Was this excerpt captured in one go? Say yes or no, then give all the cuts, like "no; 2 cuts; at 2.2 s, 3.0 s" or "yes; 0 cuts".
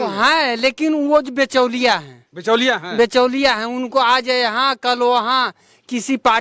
yes; 0 cuts